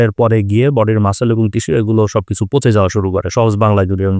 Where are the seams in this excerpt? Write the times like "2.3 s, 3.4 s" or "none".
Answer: none